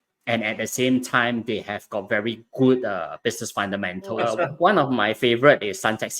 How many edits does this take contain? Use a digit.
1